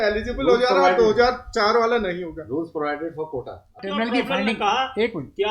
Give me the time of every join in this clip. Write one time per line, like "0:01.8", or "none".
0:03.8